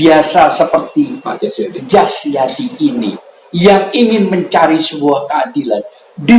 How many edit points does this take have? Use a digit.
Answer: 0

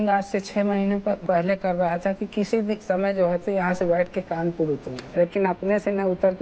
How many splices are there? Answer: 2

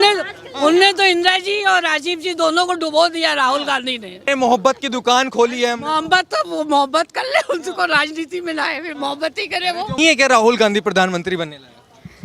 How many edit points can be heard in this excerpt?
2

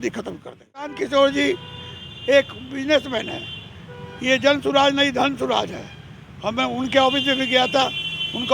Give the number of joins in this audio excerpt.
1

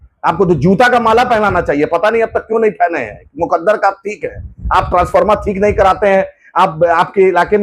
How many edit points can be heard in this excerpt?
0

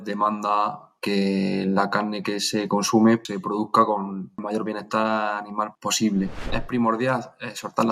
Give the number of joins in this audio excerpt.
4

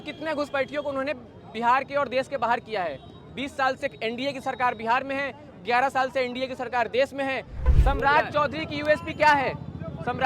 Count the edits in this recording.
1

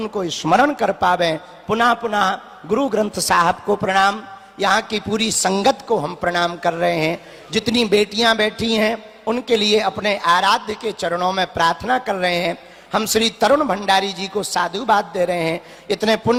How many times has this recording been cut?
0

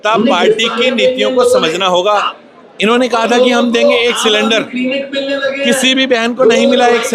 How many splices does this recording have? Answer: 1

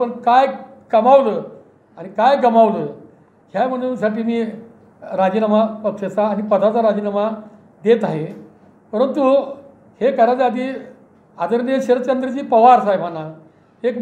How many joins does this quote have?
0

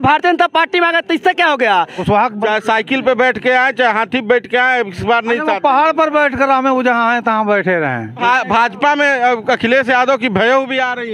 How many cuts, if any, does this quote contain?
2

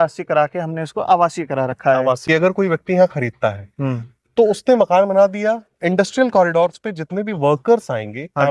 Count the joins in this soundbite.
1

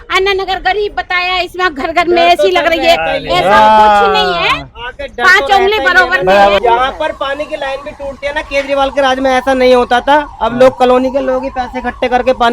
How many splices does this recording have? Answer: 1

